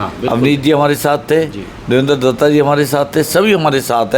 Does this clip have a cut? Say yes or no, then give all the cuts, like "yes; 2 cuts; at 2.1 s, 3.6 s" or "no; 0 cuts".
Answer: no; 0 cuts